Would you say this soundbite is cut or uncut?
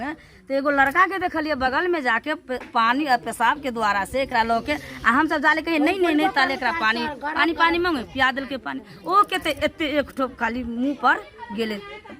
uncut